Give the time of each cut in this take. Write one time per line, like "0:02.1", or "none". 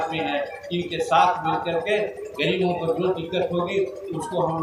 none